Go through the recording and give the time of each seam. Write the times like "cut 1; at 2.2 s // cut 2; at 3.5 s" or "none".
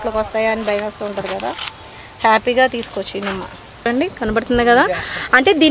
cut 1; at 3.9 s